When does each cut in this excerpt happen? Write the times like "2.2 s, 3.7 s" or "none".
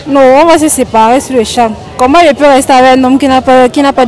none